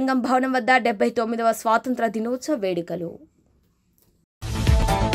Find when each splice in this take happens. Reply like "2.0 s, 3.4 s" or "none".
none